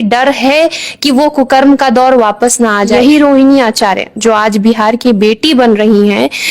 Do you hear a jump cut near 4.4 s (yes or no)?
no